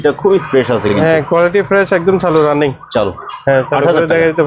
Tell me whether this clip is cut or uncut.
uncut